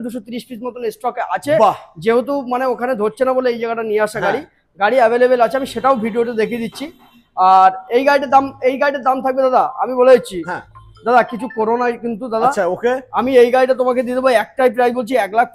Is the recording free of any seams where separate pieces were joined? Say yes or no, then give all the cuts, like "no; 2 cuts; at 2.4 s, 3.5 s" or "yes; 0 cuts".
yes; 0 cuts